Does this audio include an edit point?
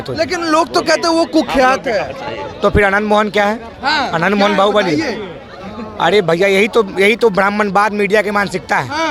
no; 0 cuts

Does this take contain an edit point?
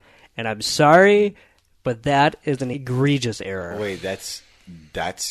yes; 1 cut; at 2.8 s

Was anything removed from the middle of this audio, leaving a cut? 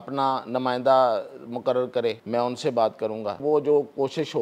yes; 2 cuts; at 2.2 s, 3.4 s

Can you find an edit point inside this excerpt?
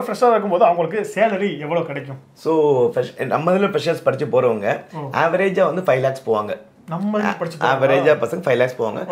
no; 0 cuts

